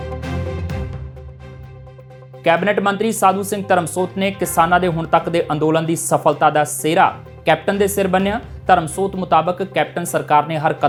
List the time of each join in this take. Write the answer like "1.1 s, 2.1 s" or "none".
none